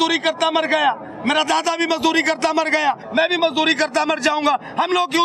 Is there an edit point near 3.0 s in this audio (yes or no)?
yes